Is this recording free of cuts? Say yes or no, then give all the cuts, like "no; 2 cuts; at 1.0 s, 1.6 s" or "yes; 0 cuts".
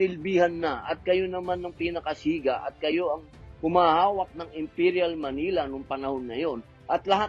yes; 0 cuts